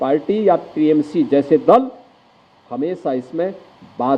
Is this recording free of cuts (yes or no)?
yes